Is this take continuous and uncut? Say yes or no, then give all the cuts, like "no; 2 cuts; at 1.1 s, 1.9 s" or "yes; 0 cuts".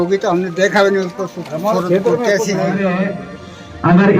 no; 1 cut; at 2.8 s